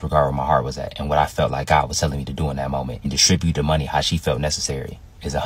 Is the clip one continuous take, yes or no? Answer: yes